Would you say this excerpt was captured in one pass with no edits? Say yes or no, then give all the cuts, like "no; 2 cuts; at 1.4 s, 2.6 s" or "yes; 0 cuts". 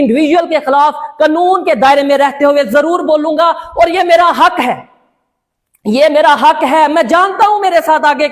yes; 0 cuts